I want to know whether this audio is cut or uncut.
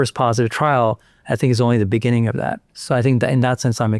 uncut